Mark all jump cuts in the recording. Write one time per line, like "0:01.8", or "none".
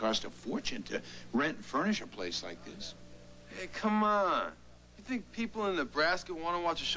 0:03.1